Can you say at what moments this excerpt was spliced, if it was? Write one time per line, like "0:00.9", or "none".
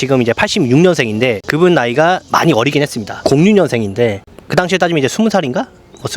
0:01.4
0:03.2

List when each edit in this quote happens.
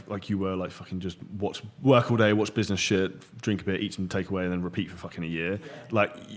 none

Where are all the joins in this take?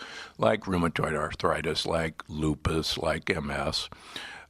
0:01.3

